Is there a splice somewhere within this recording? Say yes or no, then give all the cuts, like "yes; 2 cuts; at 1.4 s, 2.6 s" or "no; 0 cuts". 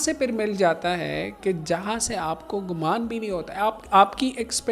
no; 0 cuts